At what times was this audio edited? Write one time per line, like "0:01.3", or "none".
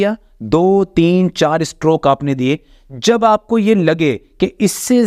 none